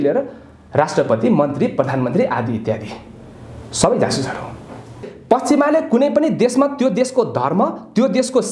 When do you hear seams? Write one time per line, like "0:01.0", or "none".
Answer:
0:05.1